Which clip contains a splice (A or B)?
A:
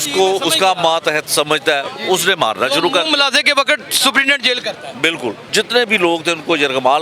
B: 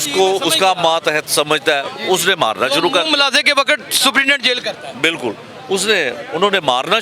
A